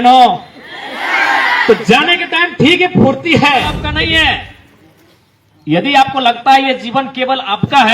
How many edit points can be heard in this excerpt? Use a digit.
1